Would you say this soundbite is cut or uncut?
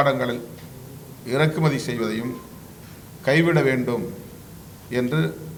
uncut